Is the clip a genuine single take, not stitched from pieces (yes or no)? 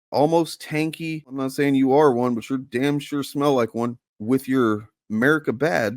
no